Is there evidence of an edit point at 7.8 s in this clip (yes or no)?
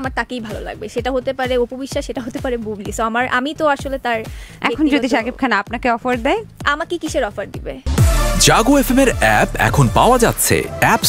yes